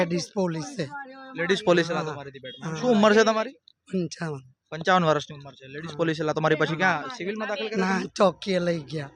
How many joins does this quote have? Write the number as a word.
zero